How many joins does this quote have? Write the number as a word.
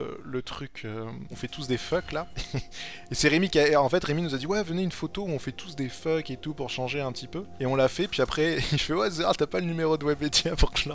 one